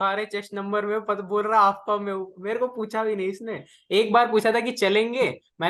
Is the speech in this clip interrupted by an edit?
no; 0 cuts

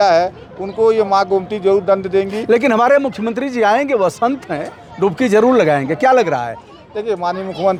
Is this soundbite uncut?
yes; 0 cuts

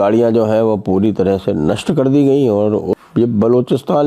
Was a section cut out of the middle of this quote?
yes; 1 cut; at 3.0 s

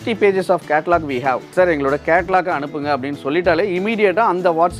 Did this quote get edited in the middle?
yes; 1 cut; at 1.5 s

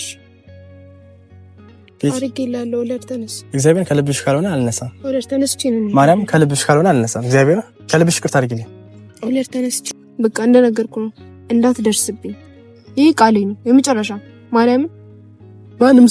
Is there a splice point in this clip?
yes; 1 cut; at 9.8 s

